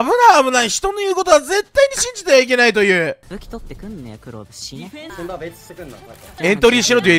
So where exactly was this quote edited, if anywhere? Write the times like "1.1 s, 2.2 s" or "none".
3.2 s, 5.1 s, 6.3 s

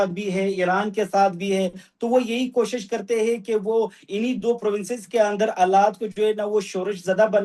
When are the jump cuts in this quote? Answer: none

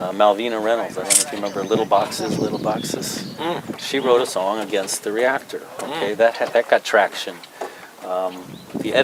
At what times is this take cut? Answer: none

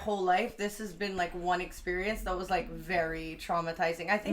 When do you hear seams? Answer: none

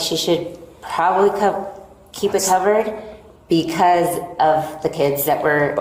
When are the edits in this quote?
none

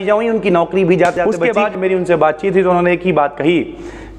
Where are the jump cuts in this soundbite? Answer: 1.6 s

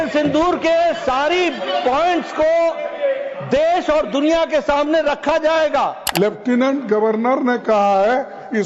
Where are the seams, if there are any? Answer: 6.0 s

